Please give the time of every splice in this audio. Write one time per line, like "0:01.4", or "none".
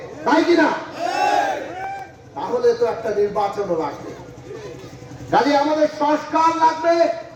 none